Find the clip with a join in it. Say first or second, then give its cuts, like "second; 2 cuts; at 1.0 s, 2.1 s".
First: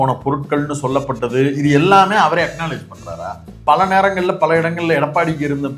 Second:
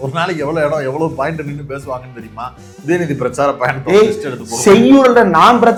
first; 1 cut; at 3.6 s